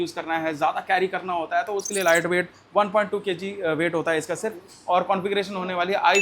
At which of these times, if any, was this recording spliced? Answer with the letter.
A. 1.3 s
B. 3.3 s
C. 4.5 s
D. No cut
D